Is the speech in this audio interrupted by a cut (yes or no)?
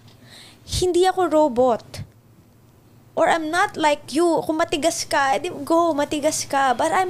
no